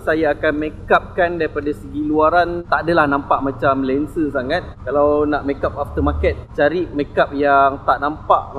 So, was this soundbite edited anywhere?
no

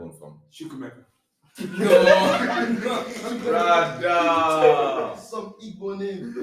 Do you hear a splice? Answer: no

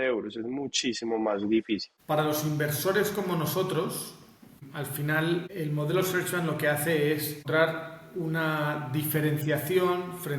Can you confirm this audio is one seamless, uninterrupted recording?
no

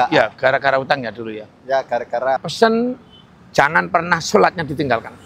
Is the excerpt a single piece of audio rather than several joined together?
no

